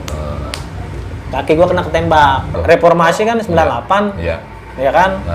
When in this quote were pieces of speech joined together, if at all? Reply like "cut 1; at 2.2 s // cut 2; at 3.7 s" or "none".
cut 1; at 2.6 s

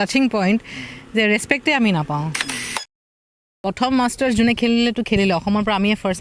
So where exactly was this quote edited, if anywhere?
cut 1; at 3.0 s

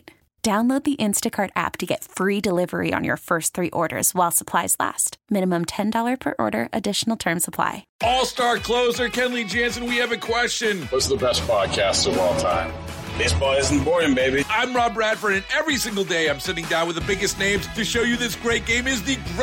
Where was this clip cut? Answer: cut 1; at 7.9 s

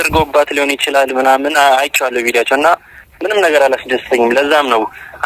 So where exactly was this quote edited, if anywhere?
none

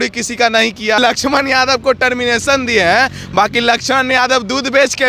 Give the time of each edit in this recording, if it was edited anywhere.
cut 1; at 1.0 s

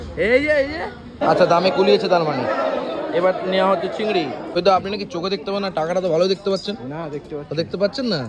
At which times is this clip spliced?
cut 1; at 1.1 s // cut 2; at 4.4 s

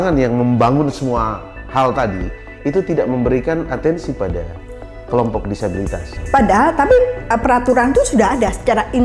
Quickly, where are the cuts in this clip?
cut 1; at 6.1 s

